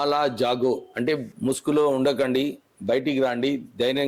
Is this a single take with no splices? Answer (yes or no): no